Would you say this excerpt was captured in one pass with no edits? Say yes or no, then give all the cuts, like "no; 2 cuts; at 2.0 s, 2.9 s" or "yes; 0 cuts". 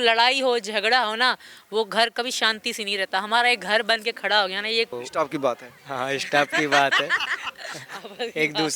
no; 1 cut; at 5.0 s